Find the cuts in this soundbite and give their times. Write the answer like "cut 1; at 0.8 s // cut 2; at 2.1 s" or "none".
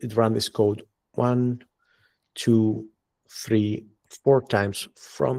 none